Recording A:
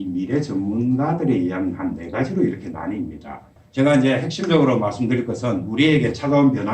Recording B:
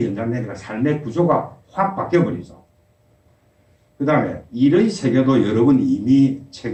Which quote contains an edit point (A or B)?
A